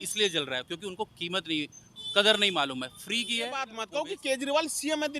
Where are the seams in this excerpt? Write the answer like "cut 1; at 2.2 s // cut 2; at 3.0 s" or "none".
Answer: cut 1; at 3.8 s